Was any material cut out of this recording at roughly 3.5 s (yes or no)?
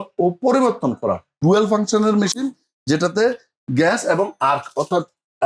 no